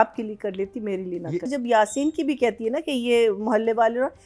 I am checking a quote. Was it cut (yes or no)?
yes